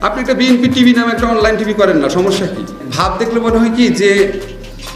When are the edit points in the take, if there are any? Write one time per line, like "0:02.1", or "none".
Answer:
0:02.8